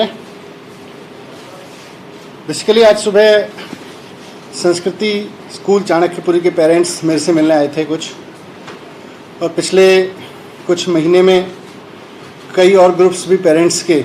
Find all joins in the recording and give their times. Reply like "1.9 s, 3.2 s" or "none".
none